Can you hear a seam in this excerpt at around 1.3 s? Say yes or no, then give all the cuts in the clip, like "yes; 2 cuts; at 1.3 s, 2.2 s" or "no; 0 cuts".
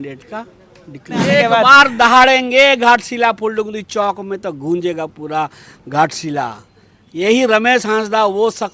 yes; 1 cut; at 1.3 s